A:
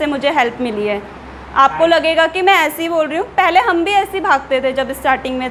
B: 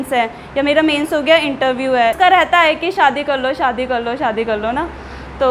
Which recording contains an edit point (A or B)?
B